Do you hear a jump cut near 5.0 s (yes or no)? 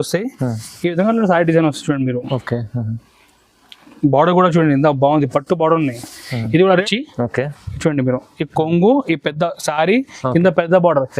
no